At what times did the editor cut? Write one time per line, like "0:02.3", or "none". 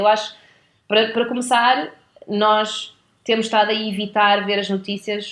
none